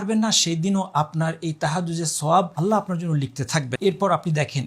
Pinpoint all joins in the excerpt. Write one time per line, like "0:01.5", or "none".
0:02.5
0:03.7